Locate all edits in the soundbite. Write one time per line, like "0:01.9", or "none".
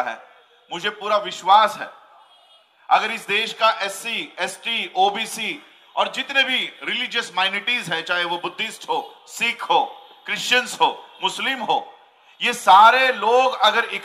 none

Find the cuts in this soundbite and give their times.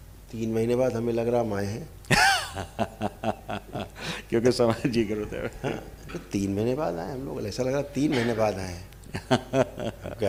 none

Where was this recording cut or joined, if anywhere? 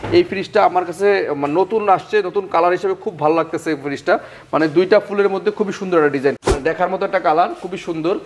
0:06.4

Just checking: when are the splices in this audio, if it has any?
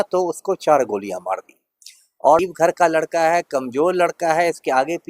0:02.4

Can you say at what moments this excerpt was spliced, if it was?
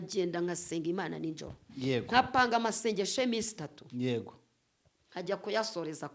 none

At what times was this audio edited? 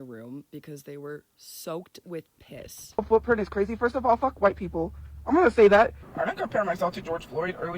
0:02.9
0:06.0

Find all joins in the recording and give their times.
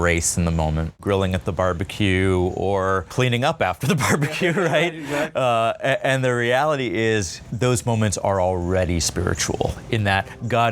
0:00.9
0:03.1
0:07.4

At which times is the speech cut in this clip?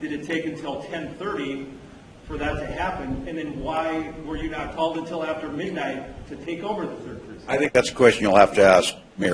0:04.5

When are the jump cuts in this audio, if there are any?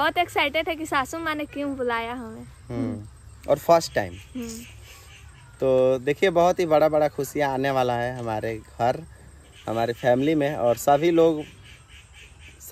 none

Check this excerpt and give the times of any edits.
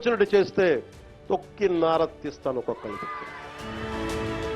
0:03.6

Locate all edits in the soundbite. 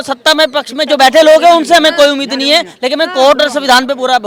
none

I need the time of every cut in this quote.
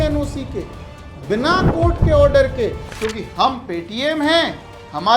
none

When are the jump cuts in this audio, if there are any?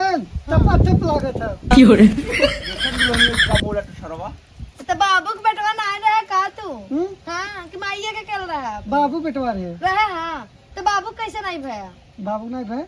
none

